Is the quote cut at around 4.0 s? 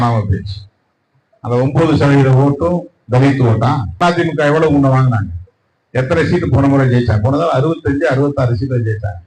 yes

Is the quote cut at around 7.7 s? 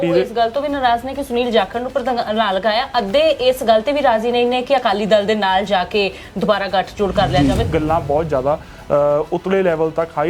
yes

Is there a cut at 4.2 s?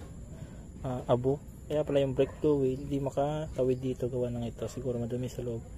no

